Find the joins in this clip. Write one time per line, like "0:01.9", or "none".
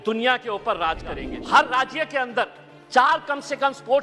0:01.3